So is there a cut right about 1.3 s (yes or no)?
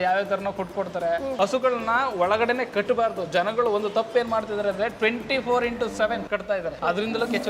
yes